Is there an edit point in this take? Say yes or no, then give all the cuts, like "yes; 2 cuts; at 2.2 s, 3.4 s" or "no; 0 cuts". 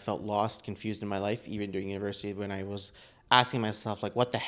no; 0 cuts